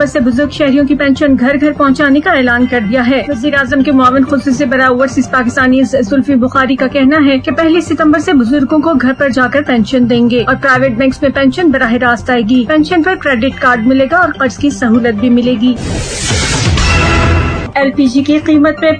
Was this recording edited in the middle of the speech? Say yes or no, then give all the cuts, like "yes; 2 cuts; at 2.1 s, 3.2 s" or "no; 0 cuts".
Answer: no; 0 cuts